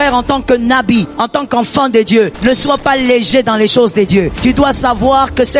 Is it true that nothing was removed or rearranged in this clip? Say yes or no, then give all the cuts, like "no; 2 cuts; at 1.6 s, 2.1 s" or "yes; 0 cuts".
no; 3 cuts; at 1.2 s, 2.3 s, 4.3 s